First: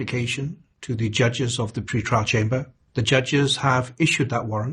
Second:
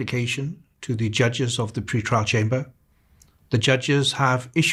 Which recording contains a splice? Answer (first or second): first